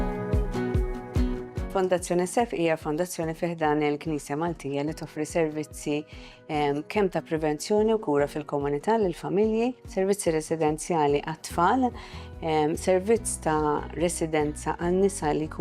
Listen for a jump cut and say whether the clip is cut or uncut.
cut